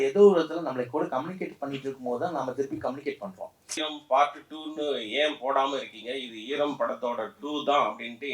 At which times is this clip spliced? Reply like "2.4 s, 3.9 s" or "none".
3.8 s